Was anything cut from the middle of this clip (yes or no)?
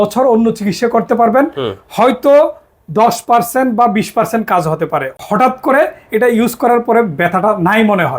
yes